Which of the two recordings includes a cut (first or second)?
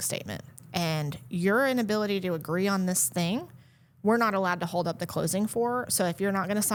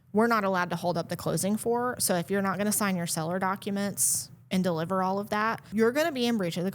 second